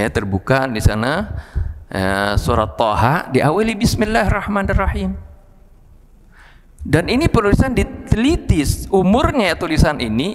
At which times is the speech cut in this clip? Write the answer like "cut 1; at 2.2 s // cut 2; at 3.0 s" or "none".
none

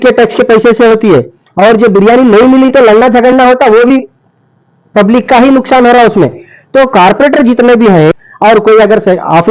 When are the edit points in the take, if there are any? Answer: cut 1; at 8.1 s

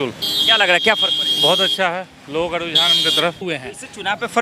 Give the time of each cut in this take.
cut 1; at 3.4 s

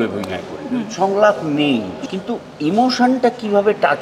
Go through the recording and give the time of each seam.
cut 1; at 2.0 s

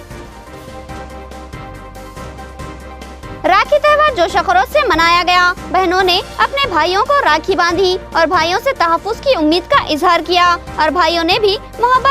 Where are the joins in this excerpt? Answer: cut 1; at 2.4 s

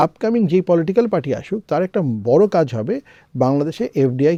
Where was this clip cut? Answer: none

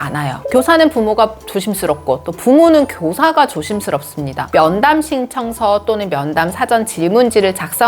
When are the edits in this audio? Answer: cut 1; at 4.5 s

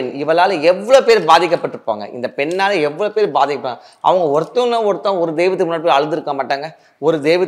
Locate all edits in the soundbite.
none

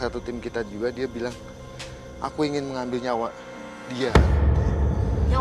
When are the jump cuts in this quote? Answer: none

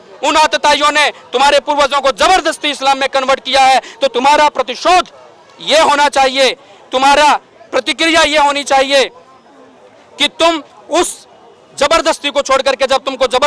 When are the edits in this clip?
none

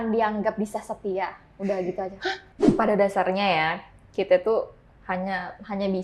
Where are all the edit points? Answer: cut 1; at 2.5 s

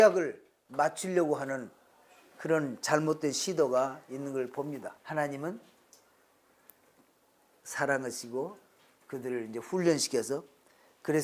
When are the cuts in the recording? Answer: cut 1; at 5.0 s

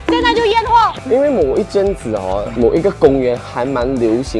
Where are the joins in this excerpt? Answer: cut 1; at 1.0 s

